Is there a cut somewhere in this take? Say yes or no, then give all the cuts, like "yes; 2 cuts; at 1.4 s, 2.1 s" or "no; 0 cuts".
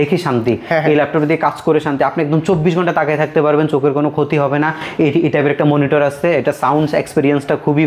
no; 0 cuts